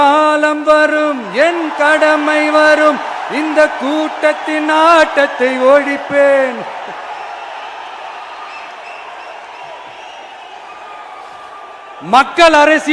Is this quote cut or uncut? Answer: uncut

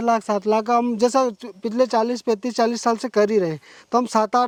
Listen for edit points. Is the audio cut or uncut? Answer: uncut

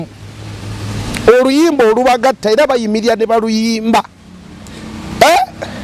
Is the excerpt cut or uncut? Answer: uncut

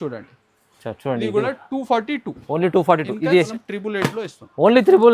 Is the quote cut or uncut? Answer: cut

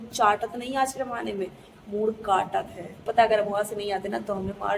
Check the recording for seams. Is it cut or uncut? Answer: cut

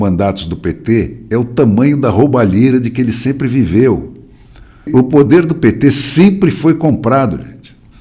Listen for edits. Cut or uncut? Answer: cut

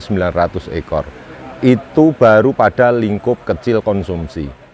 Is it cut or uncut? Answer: uncut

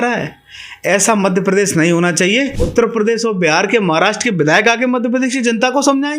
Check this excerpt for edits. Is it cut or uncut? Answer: cut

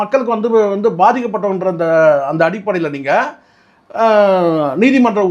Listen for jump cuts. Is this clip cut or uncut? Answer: uncut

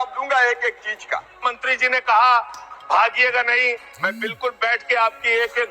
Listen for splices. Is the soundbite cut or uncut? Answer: cut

